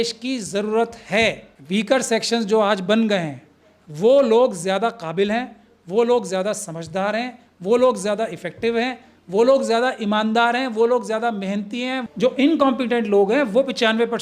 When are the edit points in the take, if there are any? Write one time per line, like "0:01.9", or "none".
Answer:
0:01.5
0:12.0